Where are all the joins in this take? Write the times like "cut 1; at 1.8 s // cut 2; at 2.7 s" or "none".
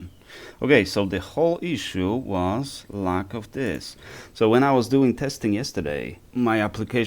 cut 1; at 6.2 s